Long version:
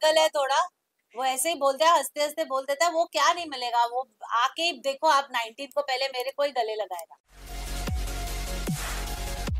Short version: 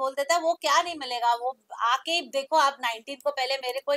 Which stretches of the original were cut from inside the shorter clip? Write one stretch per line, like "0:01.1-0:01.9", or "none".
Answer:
none